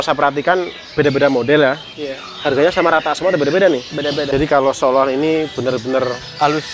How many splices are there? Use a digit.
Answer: 1